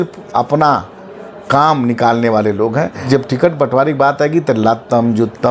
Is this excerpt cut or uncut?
cut